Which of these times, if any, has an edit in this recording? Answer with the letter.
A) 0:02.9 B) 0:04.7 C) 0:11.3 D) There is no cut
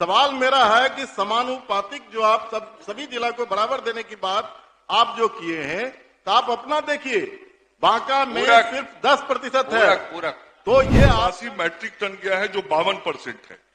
C